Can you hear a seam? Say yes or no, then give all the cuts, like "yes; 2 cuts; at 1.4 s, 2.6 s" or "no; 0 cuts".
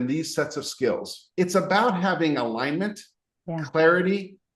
yes; 1 cut; at 1.2 s